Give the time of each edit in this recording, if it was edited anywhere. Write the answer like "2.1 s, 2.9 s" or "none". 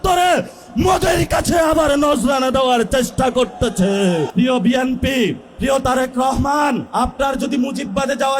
4.3 s, 5.5 s, 6.9 s